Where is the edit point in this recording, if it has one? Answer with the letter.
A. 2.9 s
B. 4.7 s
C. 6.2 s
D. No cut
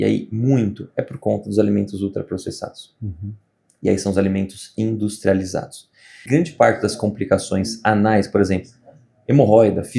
C